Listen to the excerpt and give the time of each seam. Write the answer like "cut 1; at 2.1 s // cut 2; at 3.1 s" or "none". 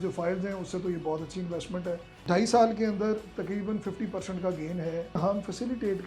cut 1; at 2.1 s // cut 2; at 5.2 s